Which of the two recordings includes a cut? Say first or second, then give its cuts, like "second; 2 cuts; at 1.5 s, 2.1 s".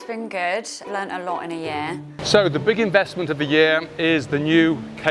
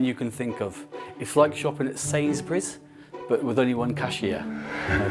first; 1 cut; at 2.1 s